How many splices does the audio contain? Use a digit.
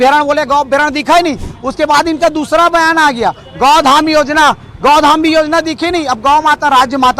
0